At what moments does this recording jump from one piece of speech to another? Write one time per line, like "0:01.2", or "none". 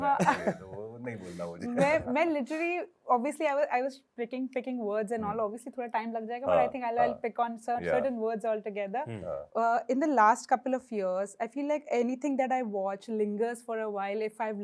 none